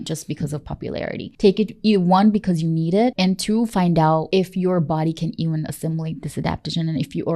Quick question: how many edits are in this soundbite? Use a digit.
3